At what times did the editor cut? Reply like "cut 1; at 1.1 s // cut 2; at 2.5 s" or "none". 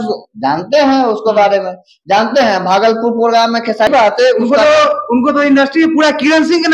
cut 1; at 3.9 s